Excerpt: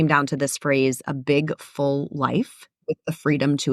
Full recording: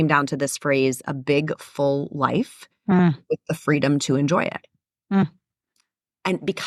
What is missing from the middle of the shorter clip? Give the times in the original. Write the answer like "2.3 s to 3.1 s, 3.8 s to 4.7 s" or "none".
2.8 s to 3.2 s